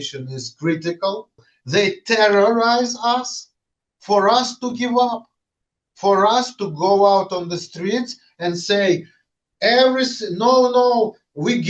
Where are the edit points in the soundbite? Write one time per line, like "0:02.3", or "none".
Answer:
0:01.5